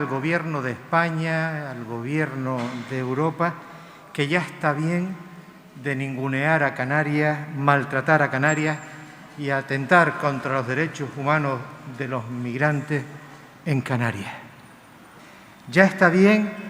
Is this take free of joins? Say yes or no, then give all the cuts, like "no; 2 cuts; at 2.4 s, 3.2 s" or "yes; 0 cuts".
no; 1 cut; at 15.2 s